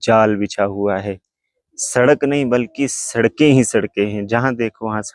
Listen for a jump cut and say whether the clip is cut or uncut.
uncut